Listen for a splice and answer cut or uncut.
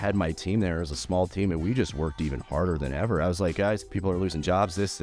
cut